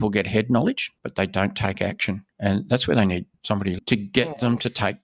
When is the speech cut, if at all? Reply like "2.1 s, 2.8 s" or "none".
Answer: 0.9 s, 2.3 s, 3.8 s